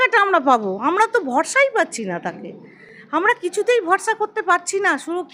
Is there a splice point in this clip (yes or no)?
no